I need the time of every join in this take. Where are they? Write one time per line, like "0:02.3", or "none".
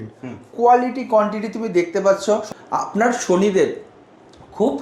0:02.4